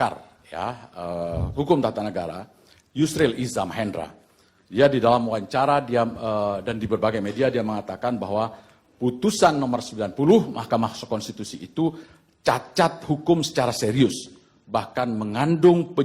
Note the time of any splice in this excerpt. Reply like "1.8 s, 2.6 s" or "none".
none